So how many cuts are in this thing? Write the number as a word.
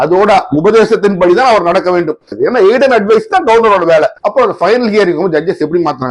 one